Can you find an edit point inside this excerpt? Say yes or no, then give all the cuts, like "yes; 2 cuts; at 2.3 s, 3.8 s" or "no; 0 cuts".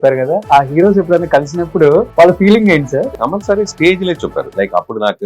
yes; 3 cuts; at 2.1 s, 3.1 s, 4.5 s